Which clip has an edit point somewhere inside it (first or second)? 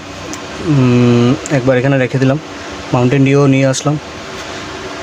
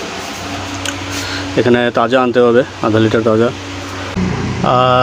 second